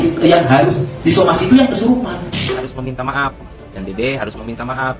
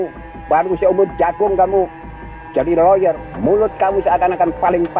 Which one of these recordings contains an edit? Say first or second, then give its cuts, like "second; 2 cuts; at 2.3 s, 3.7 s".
first; 1 cut; at 2.0 s